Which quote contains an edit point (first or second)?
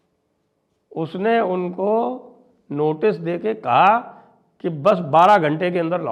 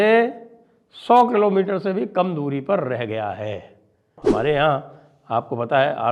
second